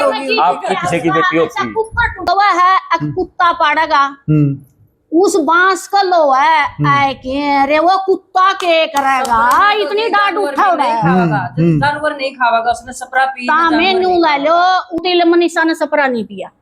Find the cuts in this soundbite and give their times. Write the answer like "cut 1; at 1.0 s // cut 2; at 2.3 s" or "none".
cut 1; at 2.2 s // cut 2; at 15.0 s